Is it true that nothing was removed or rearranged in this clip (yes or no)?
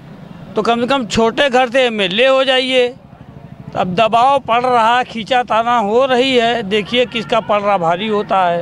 yes